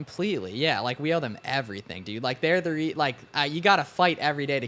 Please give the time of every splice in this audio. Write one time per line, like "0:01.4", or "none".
none